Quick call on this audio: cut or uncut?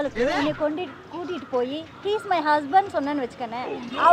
uncut